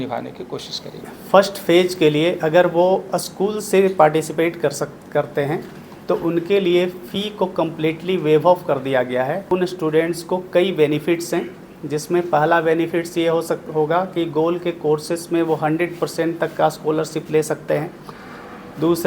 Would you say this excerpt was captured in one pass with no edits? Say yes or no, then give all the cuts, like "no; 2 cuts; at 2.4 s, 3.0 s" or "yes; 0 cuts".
no; 2 cuts; at 1.1 s, 9.4 s